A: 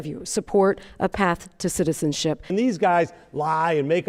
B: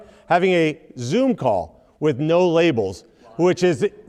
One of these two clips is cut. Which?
A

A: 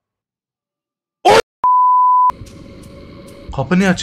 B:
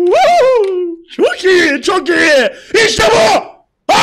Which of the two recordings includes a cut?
A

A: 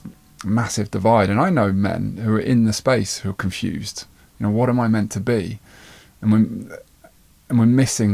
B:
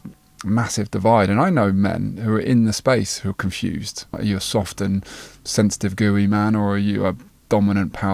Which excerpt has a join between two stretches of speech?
B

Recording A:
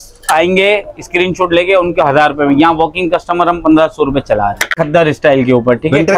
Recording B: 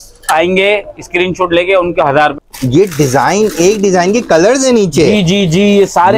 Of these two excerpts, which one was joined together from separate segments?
B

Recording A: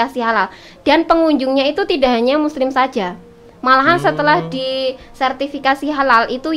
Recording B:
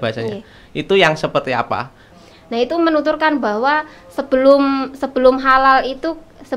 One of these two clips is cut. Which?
B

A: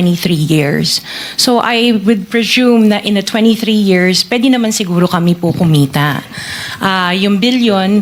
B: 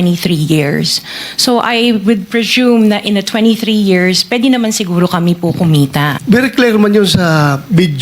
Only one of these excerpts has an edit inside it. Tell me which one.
B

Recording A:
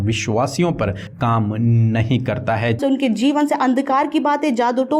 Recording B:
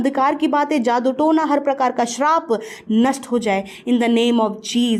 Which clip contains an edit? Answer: A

